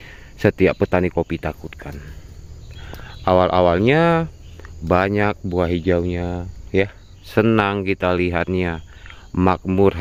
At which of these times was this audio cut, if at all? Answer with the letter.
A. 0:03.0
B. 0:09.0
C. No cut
C